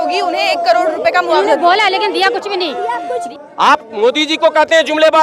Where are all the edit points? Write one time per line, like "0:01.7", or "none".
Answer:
0:03.3